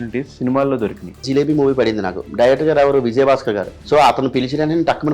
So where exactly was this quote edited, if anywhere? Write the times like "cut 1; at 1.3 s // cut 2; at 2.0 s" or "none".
cut 1; at 1.2 s // cut 2; at 3.7 s

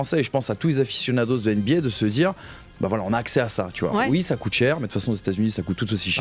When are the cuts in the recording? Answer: none

